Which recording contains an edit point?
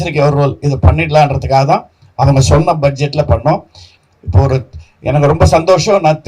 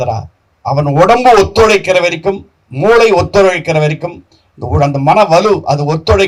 first; 1 cut; at 3.9 s

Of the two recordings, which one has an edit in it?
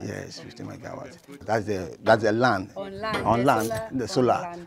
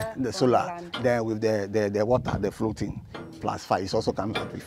first; 1 cut; at 1.4 s

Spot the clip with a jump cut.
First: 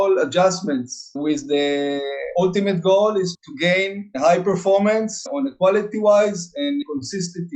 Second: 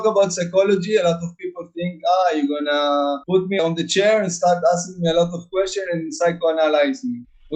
first; 3 cuts; at 1.1 s, 5.2 s, 6.8 s

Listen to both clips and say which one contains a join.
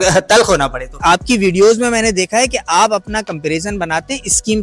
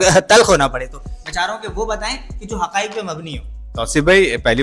first; 1 cut; at 1.0 s

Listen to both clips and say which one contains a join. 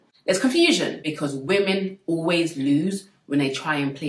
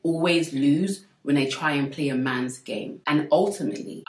first; 1 cut; at 1.0 s

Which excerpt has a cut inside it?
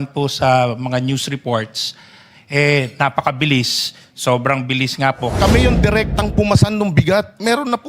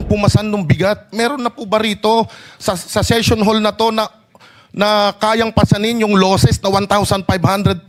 first; 1 cut; at 5.3 s

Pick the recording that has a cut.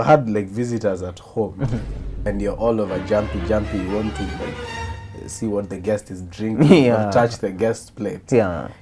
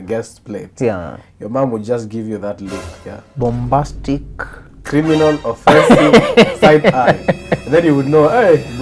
first; 1 cut; at 2.3 s

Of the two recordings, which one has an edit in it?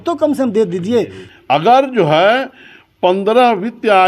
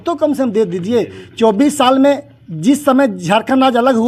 first; 1 cut; at 1.2 s

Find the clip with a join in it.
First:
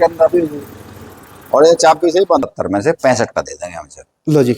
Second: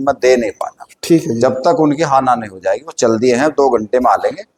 first; 1 cut; at 2.4 s

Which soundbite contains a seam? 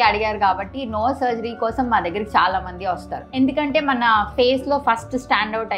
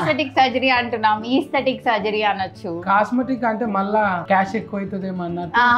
first; 1 cut; at 3.3 s

